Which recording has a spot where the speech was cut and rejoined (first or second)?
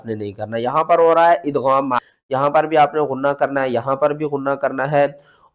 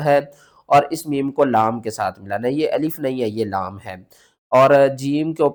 first